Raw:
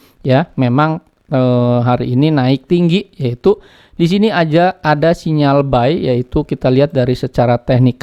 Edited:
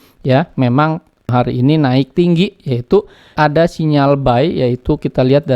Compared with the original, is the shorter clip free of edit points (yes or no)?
no